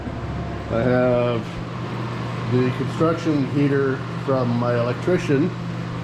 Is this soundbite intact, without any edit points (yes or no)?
yes